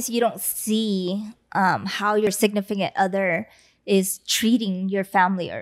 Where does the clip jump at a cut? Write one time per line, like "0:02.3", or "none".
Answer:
0:02.3